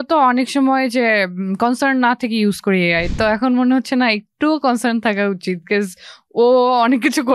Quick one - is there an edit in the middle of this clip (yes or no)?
no